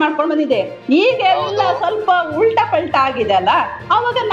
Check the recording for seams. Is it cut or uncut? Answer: uncut